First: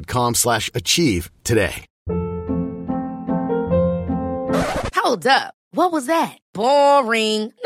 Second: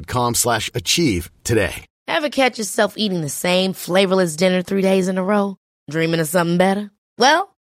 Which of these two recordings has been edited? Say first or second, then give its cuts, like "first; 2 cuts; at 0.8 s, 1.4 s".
first; 1 cut; at 1.9 s